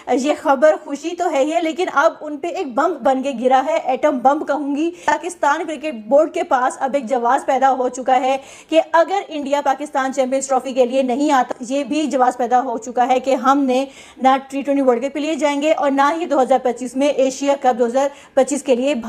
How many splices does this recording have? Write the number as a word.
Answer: two